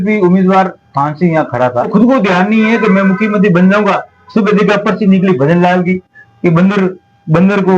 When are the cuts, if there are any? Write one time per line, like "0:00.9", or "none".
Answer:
0:01.9